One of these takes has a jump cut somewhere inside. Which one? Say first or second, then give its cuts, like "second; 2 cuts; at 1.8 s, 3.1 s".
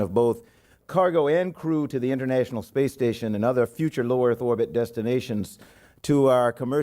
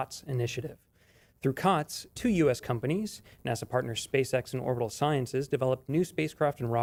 first; 1 cut; at 4.7 s